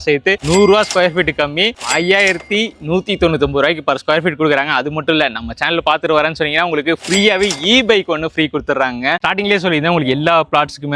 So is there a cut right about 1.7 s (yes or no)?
no